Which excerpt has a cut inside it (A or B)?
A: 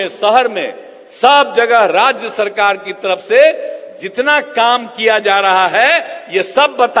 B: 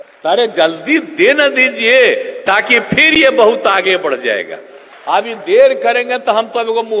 B